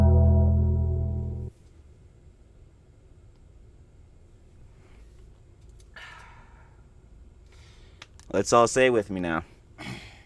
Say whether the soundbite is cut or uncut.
cut